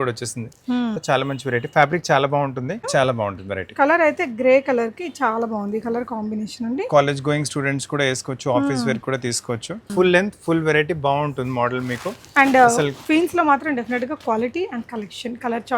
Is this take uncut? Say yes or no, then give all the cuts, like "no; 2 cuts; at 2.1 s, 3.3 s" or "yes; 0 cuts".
no; 3 cuts; at 1.0 s, 2.8 s, 9.9 s